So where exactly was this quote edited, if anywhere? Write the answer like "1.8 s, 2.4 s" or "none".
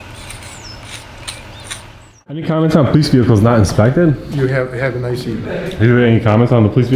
2.5 s